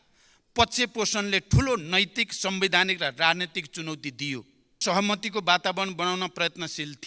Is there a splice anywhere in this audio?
yes; 1 cut; at 4.8 s

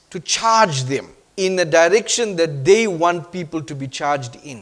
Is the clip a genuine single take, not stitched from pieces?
no; 1 cut; at 1.2 s

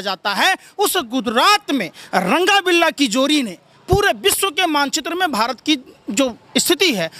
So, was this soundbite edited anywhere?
no; 0 cuts

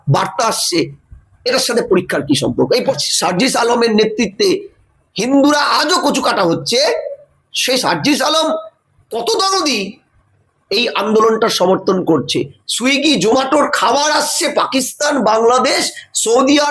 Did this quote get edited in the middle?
yes; 1 cut; at 2.9 s

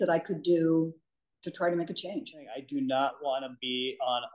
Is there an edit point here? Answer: yes; 1 cut; at 2.6 s

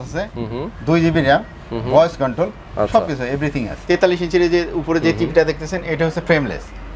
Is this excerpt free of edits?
no; 1 cut; at 3.7 s

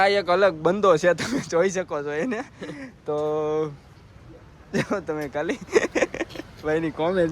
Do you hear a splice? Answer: yes; 1 cut; at 6.1 s

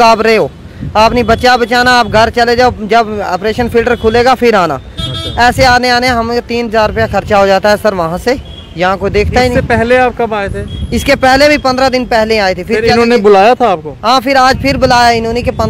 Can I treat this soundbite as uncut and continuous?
yes; 0 cuts

